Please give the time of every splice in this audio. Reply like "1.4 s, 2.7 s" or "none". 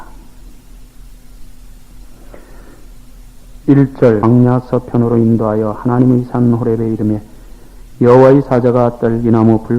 4.2 s